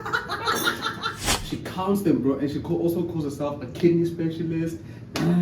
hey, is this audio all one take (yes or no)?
no